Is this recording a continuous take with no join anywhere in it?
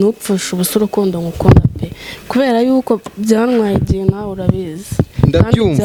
yes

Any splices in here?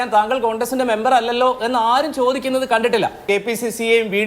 yes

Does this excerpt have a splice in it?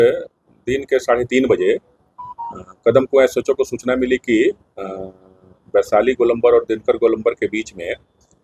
no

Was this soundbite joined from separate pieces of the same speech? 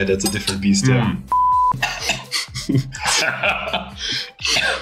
no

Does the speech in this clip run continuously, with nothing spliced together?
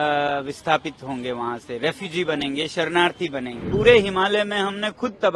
no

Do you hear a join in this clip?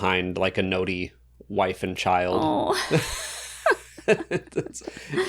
no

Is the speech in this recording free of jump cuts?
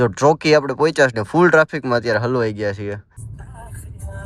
no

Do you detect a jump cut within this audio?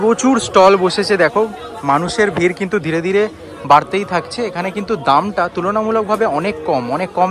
no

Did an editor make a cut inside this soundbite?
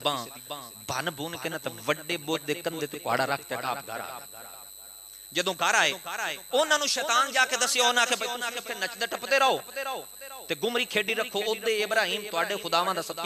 no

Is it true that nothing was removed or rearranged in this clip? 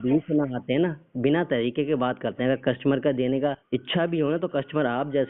no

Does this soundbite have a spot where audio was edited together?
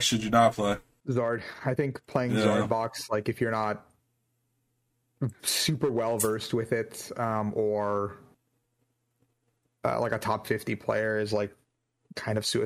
yes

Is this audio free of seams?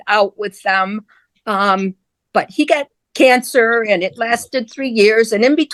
yes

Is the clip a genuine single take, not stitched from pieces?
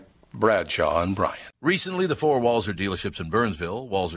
no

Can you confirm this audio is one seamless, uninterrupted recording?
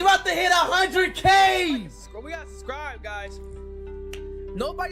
yes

